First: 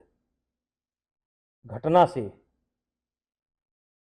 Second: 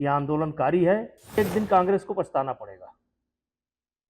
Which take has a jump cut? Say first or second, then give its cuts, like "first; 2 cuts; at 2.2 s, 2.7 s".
second; 1 cut; at 1.4 s